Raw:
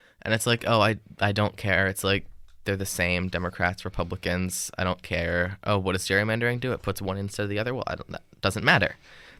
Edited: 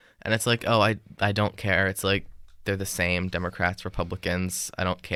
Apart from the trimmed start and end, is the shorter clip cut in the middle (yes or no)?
no